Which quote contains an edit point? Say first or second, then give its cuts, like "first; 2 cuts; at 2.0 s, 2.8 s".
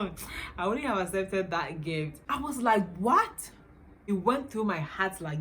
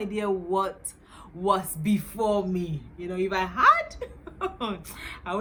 first; 2 cuts; at 2.2 s, 4.0 s